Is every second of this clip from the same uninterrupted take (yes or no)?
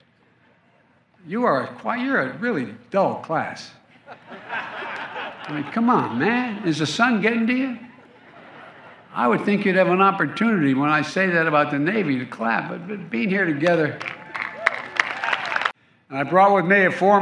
no